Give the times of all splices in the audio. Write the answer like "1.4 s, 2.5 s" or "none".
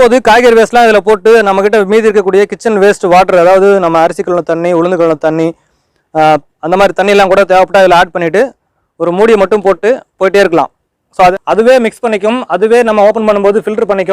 11.3 s